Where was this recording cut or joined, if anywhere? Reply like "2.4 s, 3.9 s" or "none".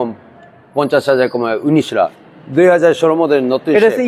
2.2 s